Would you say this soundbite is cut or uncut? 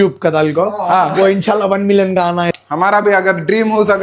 cut